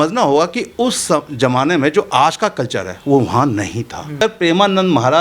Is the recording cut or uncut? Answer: cut